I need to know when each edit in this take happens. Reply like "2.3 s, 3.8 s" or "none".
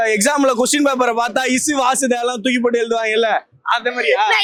none